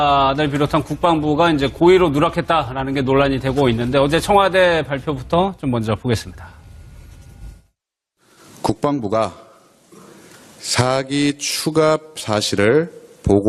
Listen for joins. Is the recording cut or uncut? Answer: uncut